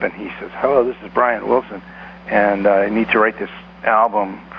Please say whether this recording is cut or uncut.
uncut